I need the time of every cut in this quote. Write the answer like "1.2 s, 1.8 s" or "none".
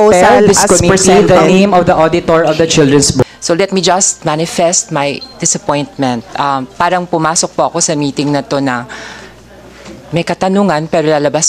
3.2 s